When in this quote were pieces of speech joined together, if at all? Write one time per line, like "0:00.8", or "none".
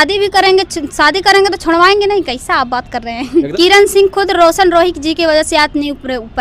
0:03.5